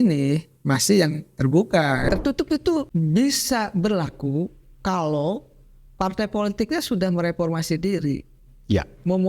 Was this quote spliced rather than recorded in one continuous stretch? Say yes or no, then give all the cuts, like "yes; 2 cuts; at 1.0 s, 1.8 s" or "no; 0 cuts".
yes; 2 cuts; at 2.1 s, 2.9 s